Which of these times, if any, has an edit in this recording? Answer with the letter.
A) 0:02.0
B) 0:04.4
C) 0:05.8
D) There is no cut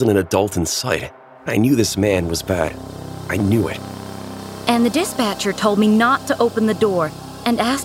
B